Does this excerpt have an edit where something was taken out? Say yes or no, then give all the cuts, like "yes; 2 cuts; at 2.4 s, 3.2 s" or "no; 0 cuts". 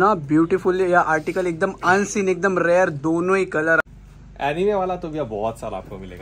yes; 1 cut; at 3.8 s